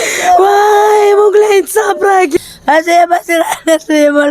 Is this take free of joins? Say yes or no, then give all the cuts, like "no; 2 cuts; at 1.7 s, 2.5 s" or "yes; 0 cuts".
no; 1 cut; at 2.3 s